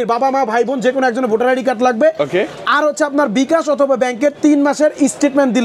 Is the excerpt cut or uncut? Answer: uncut